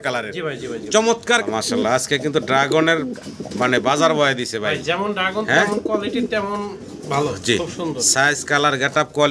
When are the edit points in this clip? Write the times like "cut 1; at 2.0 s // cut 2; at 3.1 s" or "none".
cut 1; at 1.4 s